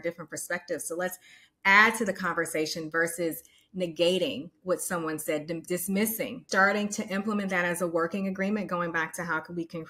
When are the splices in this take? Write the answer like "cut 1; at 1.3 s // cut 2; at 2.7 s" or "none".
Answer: cut 1; at 6.4 s